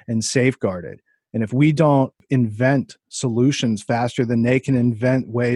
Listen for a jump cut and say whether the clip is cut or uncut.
cut